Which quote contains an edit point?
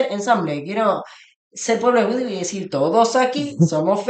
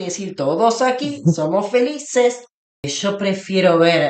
second; 1 cut; at 2.9 s

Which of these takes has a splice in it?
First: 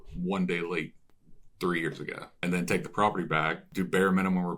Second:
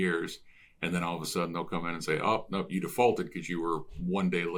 first; 2 cuts; at 2.2 s, 3.6 s

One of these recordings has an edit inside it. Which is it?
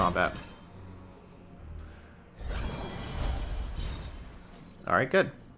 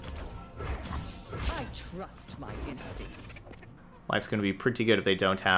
second; 1 cut; at 3.8 s

